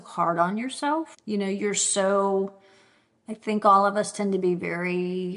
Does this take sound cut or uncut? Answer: cut